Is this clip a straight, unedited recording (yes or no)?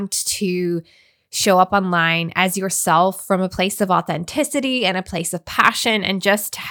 yes